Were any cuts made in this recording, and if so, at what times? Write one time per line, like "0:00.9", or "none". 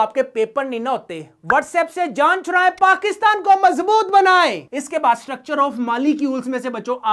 none